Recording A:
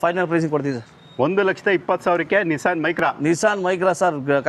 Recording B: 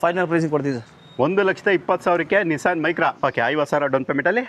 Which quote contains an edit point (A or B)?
B